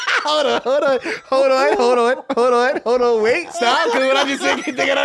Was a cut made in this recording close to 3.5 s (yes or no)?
yes